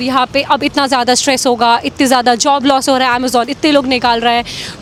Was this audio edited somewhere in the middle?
no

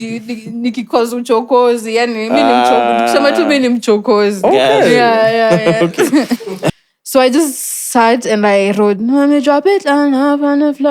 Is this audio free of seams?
no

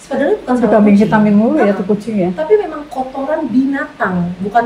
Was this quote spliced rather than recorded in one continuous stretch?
no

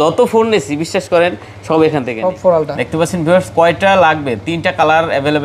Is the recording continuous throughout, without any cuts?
no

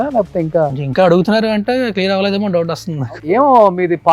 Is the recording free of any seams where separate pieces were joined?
no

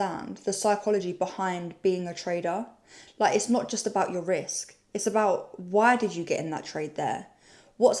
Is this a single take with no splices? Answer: yes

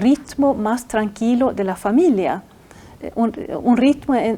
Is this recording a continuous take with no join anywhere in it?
yes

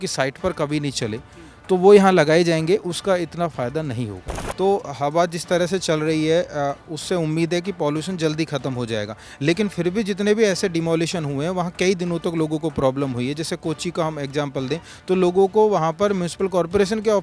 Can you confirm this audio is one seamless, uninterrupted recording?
no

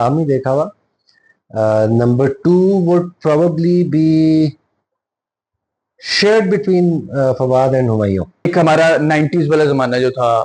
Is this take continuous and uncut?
no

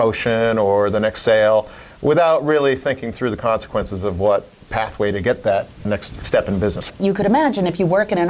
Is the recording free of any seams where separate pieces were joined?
no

